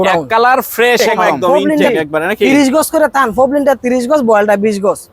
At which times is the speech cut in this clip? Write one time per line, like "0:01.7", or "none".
0:01.9